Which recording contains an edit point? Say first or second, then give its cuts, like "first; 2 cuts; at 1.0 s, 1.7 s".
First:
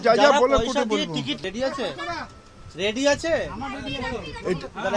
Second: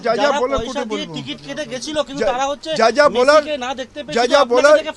second; 1 cut; at 1.3 s